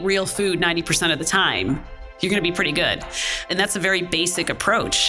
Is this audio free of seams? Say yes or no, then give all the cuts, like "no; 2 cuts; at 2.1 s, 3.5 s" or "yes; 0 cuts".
no; 1 cut; at 3.5 s